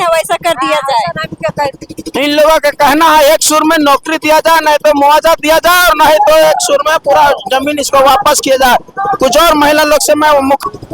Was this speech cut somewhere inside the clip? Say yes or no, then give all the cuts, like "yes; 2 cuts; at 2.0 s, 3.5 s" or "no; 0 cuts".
no; 0 cuts